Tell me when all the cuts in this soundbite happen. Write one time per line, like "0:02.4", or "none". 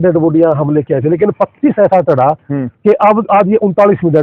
none